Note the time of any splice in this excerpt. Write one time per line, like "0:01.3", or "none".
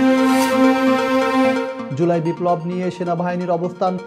0:01.8